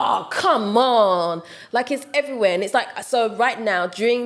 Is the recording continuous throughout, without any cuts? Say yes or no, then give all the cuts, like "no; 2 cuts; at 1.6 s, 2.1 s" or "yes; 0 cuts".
yes; 0 cuts